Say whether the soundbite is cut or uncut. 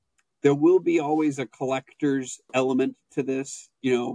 uncut